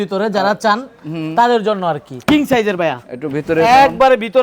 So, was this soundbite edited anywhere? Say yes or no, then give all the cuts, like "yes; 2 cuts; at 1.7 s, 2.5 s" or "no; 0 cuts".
yes; 1 cut; at 2.1 s